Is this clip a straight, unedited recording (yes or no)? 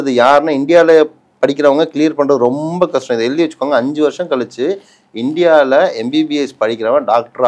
yes